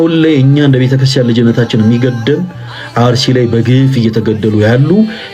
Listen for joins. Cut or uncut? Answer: uncut